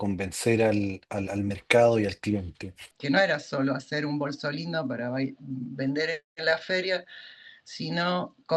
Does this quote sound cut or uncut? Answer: cut